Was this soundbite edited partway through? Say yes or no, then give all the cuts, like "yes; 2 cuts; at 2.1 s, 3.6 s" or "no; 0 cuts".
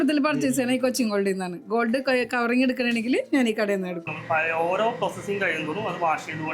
yes; 1 cut; at 4.0 s